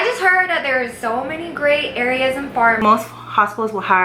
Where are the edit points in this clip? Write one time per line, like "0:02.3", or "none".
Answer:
0:02.8